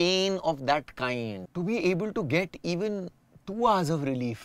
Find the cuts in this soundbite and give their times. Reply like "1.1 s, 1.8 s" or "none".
1.4 s